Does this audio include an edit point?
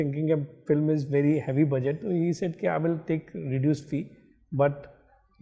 no; 0 cuts

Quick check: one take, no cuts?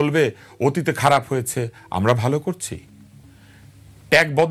yes; 0 cuts

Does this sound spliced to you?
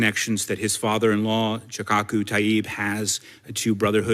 no; 0 cuts

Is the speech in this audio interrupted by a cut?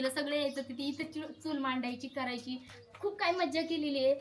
no; 0 cuts

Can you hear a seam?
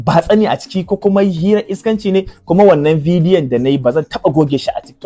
yes; 1 cut; at 2.3 s

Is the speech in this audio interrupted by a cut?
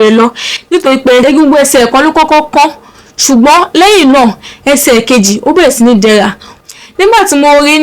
yes; 2 cuts; at 1.2 s, 6.6 s

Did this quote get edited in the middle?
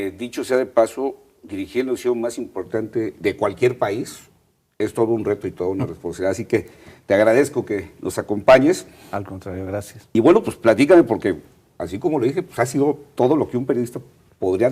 yes; 1 cut; at 6.4 s

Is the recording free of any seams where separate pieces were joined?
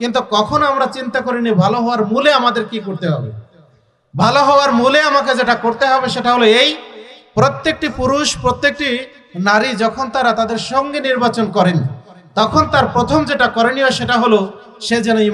yes; 0 cuts

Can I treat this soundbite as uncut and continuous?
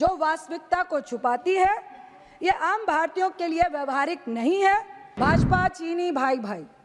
no; 1 cut; at 5.0 s

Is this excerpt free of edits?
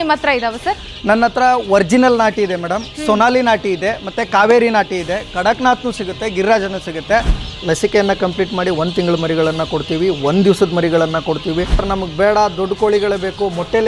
no; 2 cuts; at 7.4 s, 11.9 s

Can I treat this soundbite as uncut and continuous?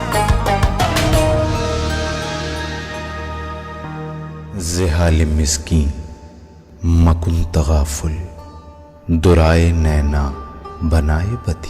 no; 1 cut; at 4.7 s

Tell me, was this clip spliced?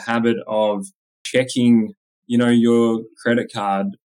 yes; 1 cut; at 1.1 s

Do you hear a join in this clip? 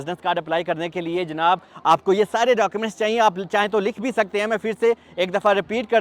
no; 0 cuts

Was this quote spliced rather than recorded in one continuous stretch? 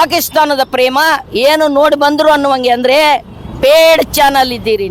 no; 0 cuts

